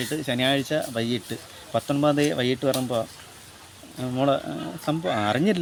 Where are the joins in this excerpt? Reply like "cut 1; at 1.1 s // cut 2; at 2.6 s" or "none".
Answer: none